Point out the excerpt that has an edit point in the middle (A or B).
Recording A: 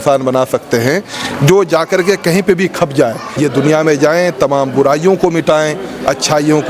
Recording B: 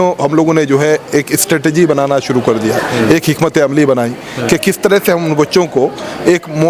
A